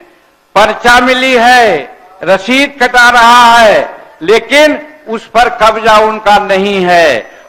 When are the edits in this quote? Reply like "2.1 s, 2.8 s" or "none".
none